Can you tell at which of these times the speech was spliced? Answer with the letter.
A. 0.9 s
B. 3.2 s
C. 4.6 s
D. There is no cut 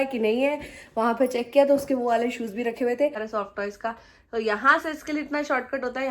B